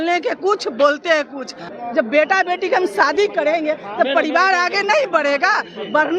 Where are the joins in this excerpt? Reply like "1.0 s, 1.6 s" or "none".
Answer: 1.6 s